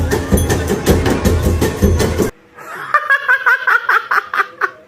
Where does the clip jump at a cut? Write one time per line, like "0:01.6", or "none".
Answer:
0:02.3